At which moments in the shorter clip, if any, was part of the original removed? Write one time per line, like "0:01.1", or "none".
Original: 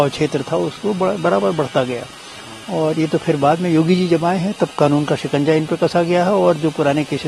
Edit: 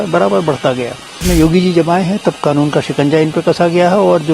0:01.2